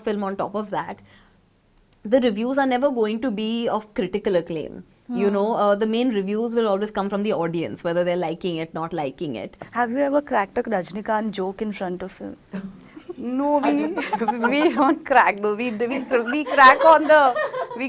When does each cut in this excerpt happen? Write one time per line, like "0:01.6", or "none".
0:09.6